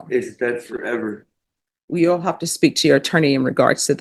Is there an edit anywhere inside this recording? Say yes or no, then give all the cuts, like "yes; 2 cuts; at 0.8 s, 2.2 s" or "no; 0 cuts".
no; 0 cuts